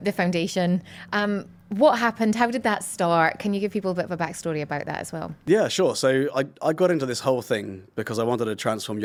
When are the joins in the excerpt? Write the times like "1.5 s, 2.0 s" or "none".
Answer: none